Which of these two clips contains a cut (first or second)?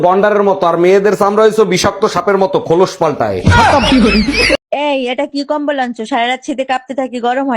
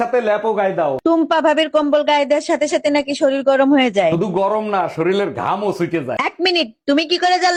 first